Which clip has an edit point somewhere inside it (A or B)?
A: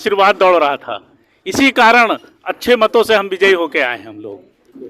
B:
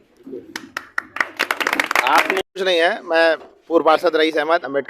B